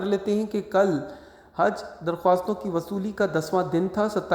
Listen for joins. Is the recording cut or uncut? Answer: uncut